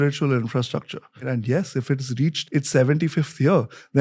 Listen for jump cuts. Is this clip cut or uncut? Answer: cut